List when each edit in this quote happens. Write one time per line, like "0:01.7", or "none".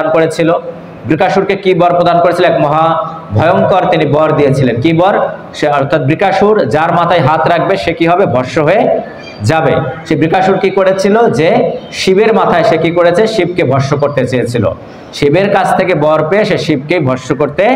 none